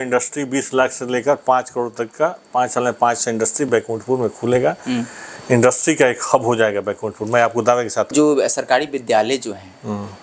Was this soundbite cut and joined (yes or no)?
yes